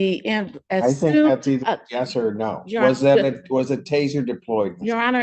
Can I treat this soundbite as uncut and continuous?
yes; 0 cuts

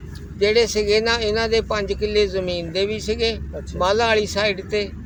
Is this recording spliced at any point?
no; 0 cuts

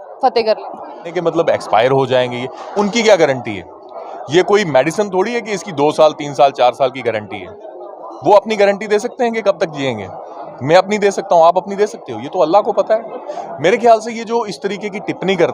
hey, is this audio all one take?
no; 1 cut; at 1.2 s

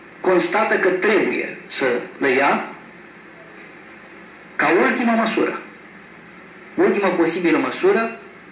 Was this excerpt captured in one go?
yes; 0 cuts

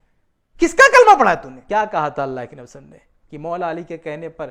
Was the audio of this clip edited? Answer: yes; 1 cut; at 1.5 s

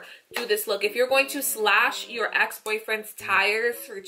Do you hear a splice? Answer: no; 0 cuts

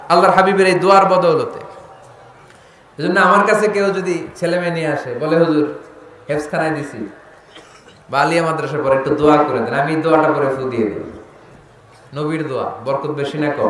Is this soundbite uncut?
yes; 0 cuts

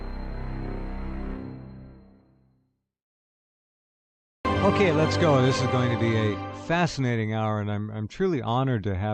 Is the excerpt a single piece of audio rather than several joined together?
yes; 0 cuts

